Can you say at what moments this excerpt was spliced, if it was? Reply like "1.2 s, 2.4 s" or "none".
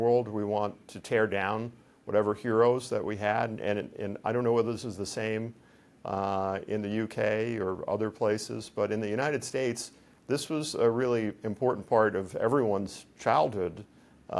none